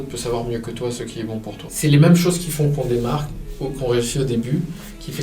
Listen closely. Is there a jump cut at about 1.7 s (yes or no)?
yes